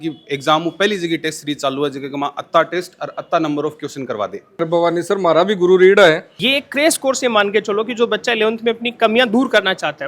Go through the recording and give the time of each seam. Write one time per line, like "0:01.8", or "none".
0:04.6
0:06.3